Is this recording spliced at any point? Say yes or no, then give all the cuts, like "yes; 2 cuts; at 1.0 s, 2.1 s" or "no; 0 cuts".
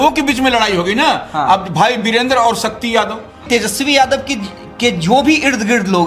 yes; 1 cut; at 3.4 s